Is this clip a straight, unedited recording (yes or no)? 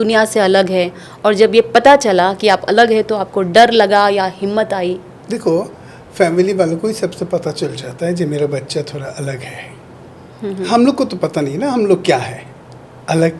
yes